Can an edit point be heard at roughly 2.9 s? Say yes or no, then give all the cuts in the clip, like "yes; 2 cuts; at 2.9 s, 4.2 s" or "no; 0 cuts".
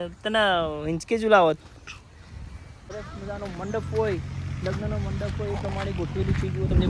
yes; 1 cut; at 2.9 s